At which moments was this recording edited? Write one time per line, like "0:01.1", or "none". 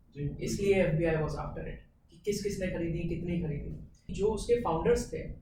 0:04.0